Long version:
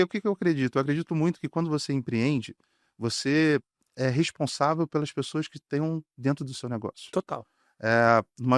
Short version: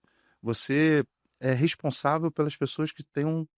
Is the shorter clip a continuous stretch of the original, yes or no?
yes